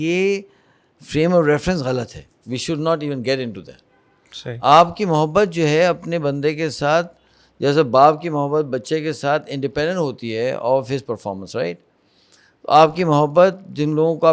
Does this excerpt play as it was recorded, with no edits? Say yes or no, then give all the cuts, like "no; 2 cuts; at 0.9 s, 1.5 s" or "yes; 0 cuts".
yes; 0 cuts